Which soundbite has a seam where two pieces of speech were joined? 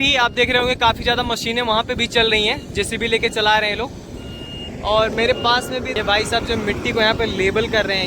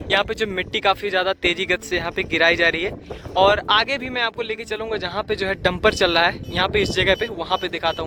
first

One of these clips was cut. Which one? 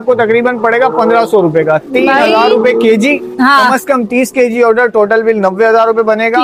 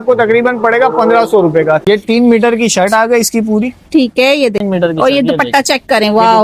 second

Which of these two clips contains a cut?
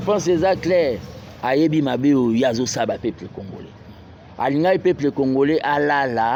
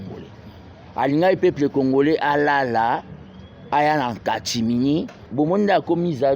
second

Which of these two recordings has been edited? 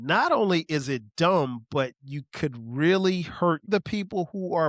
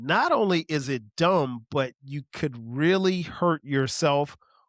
first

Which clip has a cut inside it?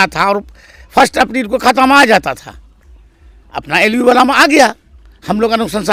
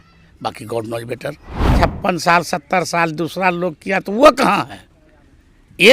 second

